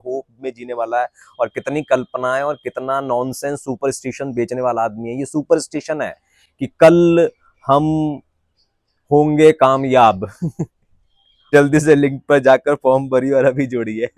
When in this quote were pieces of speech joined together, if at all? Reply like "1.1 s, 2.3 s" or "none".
11.5 s